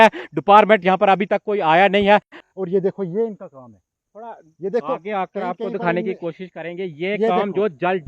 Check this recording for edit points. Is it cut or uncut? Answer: cut